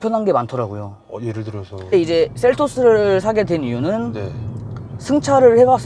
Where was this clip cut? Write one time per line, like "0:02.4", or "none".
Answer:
0:01.9